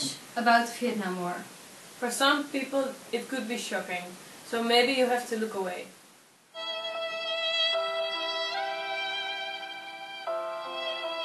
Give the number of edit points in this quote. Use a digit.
1